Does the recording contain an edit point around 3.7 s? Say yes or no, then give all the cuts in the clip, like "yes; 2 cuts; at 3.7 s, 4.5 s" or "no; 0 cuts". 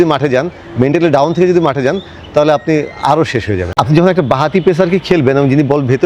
yes; 1 cut; at 3.7 s